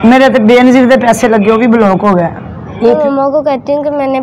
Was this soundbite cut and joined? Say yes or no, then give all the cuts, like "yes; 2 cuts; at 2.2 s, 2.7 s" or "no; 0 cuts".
yes; 1 cut; at 3.0 s